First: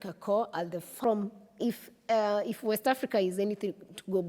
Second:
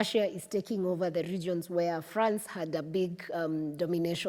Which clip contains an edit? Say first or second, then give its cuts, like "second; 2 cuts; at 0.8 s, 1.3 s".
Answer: first; 1 cut; at 0.9 s